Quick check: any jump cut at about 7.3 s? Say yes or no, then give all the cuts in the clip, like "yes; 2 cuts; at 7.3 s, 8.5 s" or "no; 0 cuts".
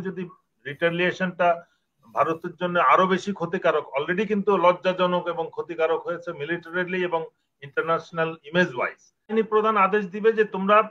no; 1 cut; at 9.3 s